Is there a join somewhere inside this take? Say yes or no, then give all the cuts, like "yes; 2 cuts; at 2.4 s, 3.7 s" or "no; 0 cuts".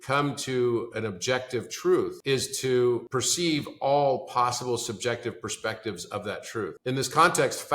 yes; 3 cuts; at 2.2 s, 3.1 s, 6.8 s